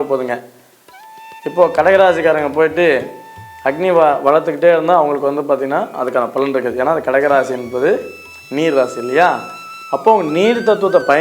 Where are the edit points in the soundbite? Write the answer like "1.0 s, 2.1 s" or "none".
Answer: none